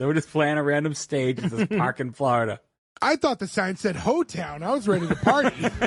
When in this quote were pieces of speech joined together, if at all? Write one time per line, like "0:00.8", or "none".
none